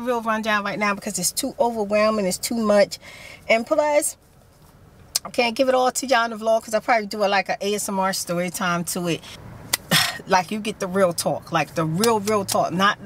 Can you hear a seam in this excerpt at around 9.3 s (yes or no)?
yes